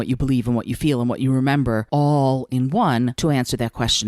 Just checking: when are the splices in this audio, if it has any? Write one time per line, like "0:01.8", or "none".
0:01.8
0:03.1